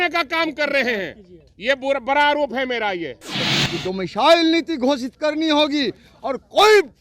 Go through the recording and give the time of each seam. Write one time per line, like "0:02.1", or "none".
0:03.5